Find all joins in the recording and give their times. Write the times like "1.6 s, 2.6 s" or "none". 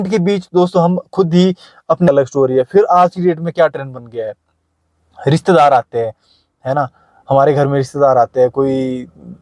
2.1 s